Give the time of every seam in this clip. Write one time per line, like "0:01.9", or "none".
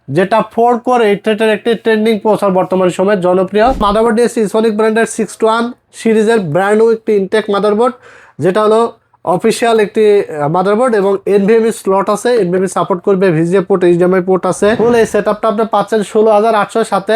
0:03.8
0:14.8